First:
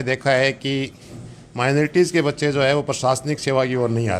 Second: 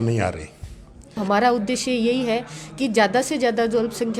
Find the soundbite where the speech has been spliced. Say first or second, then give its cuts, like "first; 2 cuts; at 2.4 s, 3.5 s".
second; 1 cut; at 1.2 s